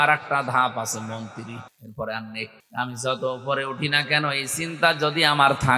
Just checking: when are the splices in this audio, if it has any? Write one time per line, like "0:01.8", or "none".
0:01.8
0:02.6